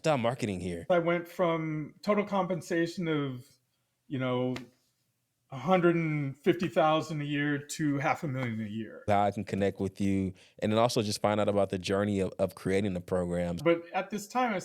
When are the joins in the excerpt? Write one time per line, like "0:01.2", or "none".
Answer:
0:00.9
0:09.1
0:13.6